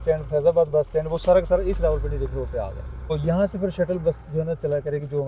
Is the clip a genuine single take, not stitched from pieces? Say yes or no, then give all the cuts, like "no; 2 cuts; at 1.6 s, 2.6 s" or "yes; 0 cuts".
no; 1 cut; at 3.1 s